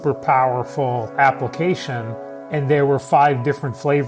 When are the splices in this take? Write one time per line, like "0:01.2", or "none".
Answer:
none